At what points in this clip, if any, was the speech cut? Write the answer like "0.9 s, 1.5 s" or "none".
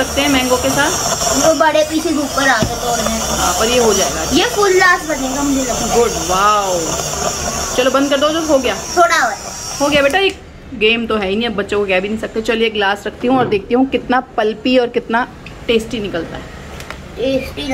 none